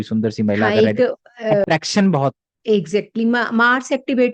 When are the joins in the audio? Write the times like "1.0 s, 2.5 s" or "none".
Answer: none